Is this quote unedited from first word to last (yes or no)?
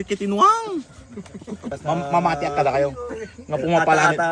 no